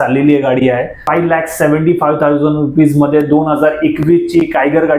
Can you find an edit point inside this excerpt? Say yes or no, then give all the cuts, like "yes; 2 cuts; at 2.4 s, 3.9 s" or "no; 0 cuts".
yes; 1 cut; at 1.0 s